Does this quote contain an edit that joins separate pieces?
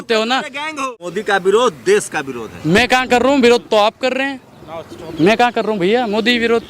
yes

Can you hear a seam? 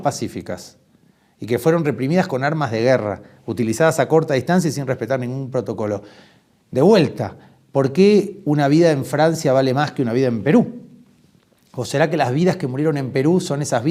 no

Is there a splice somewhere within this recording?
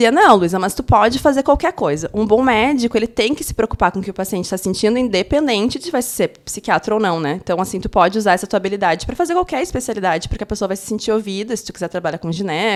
no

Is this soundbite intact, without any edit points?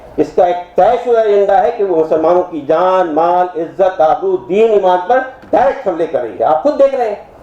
yes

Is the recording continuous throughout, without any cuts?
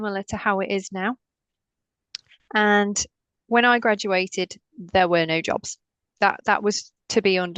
yes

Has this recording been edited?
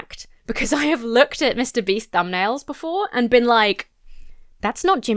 no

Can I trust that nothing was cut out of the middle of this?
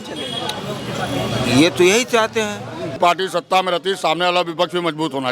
no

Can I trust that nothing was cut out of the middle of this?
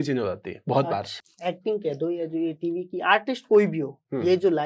no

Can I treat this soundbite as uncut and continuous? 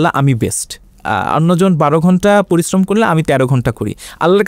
no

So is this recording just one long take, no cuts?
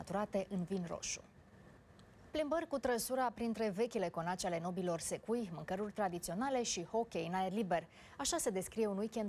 no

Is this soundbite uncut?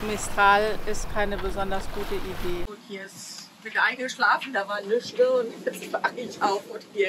no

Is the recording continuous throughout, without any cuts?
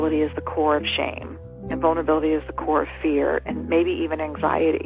no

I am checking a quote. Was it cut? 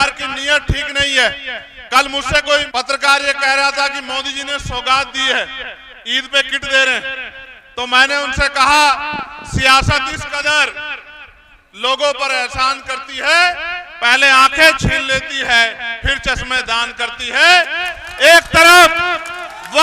yes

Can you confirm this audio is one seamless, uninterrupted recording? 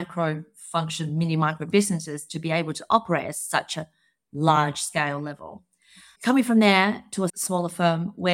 yes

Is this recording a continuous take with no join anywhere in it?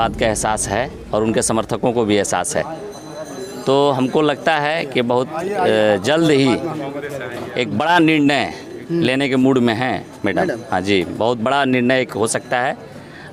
yes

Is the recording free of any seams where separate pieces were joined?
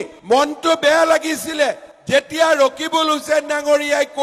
yes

